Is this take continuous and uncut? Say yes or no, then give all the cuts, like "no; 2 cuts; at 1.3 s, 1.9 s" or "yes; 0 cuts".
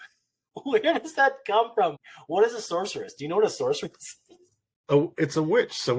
no; 1 cut; at 2.0 s